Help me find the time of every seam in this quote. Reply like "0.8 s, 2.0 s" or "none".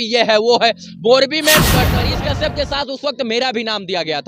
2.0 s